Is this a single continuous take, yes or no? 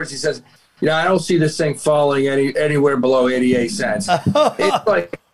yes